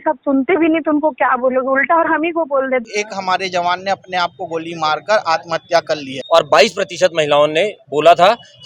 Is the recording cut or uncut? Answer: cut